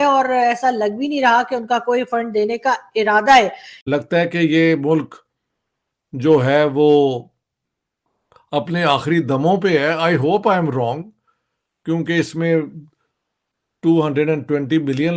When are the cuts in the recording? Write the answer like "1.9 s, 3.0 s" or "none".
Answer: 3.7 s